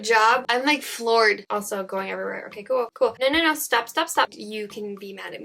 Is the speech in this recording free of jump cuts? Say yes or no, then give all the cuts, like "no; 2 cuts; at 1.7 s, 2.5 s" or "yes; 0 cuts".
no; 2 cuts; at 1.4 s, 4.3 s